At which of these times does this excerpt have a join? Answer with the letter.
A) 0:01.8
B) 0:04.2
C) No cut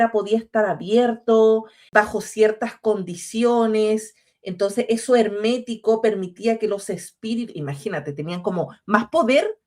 A